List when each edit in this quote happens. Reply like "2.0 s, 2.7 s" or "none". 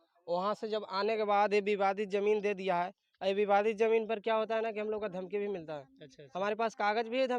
none